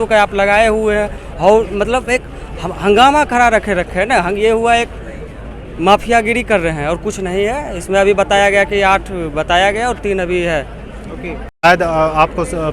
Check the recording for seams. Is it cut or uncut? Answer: cut